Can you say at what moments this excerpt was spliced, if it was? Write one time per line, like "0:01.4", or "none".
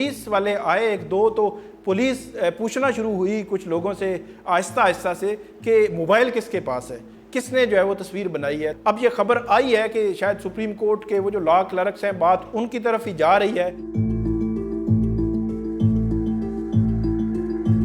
0:08.8
0:13.8